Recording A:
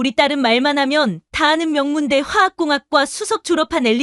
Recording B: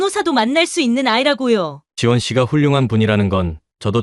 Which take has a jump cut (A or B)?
B